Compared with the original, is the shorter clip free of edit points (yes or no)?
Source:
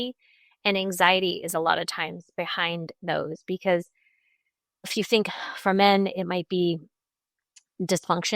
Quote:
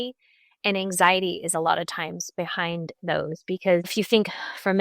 no